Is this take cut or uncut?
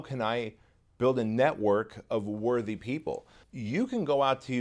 cut